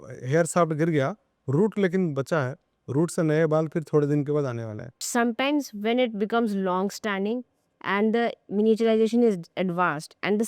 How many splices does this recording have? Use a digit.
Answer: 1